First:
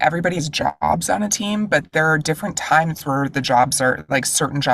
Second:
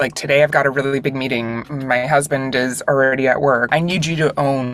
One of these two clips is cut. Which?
second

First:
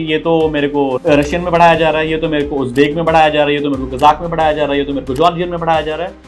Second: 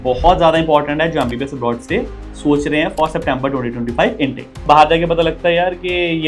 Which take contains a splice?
second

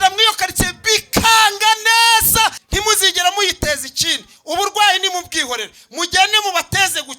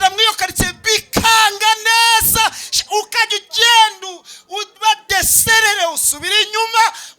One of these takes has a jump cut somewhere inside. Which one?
first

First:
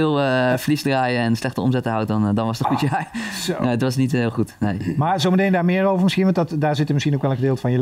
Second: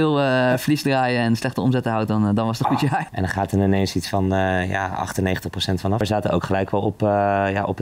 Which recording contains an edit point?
second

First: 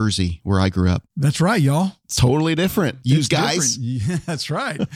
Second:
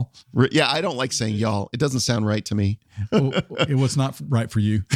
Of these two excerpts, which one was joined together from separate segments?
first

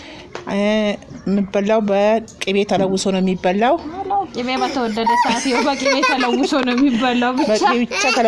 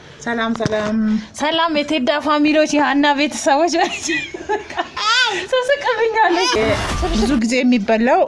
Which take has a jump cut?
second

